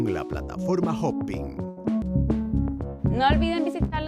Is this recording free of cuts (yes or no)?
no